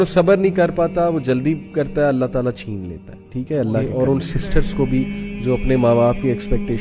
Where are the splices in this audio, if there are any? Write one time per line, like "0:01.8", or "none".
0:03.9